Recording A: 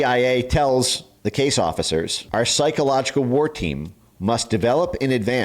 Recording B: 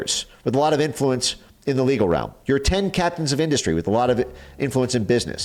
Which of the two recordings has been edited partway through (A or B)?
A